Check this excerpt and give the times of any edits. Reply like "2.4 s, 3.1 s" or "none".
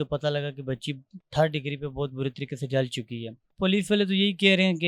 3.5 s

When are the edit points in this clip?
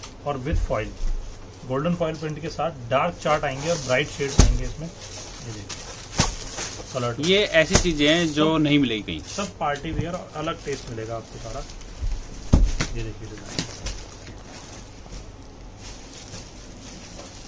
none

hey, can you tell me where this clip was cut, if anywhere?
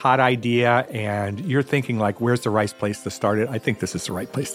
none

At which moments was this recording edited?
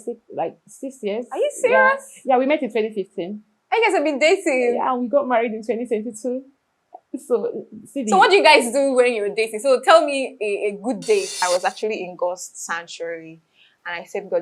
11.3 s

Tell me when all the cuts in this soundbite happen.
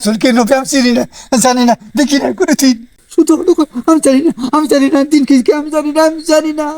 3.0 s

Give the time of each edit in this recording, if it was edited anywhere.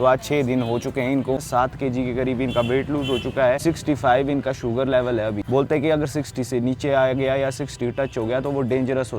1.4 s, 3.6 s, 5.4 s

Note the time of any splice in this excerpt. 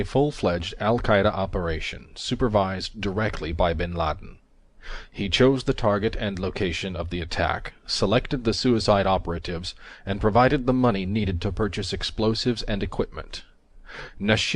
11.7 s

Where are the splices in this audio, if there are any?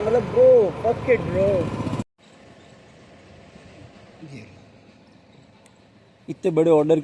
2.0 s

